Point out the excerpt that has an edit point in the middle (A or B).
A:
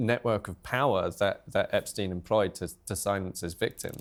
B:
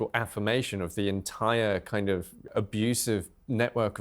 B